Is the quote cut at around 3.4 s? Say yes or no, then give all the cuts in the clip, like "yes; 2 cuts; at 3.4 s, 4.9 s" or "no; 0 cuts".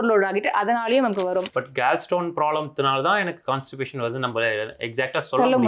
no; 1 cut; at 1.5 s